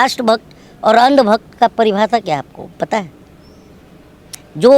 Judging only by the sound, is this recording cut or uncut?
uncut